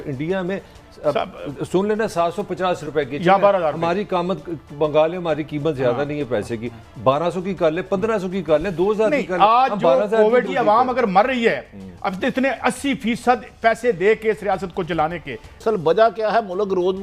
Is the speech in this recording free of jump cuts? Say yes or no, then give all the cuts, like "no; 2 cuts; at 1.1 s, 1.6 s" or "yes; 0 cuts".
no; 2 cuts; at 10.5 s, 15.6 s